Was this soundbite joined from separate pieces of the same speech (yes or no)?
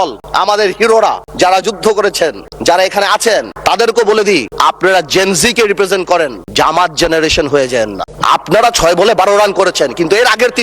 yes